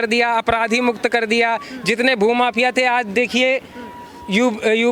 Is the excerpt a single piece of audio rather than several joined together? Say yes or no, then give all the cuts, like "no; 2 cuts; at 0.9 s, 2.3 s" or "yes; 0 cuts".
yes; 0 cuts